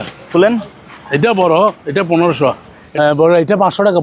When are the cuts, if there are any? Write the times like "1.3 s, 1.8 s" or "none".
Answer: 2.8 s